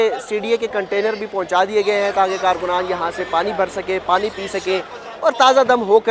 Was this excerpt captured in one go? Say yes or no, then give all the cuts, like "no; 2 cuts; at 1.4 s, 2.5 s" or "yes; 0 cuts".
yes; 0 cuts